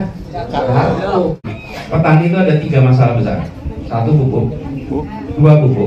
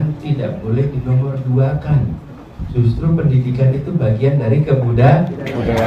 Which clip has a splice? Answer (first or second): first